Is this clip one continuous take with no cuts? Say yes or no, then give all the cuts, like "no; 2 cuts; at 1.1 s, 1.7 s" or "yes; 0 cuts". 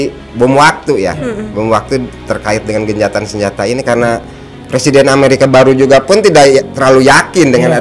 yes; 0 cuts